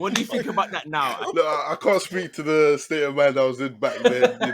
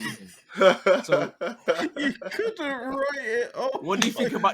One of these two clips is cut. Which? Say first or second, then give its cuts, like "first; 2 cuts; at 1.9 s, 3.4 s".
second; 1 cut; at 1.6 s